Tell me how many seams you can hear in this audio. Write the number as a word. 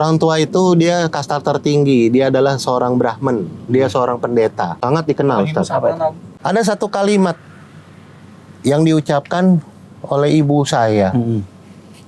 two